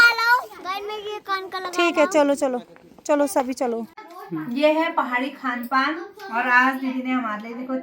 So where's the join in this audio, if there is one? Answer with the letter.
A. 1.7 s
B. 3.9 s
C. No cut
B